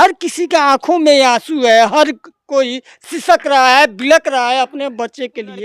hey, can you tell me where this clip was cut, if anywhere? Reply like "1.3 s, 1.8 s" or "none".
none